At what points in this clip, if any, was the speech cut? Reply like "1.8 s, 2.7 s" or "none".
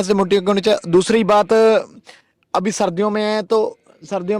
none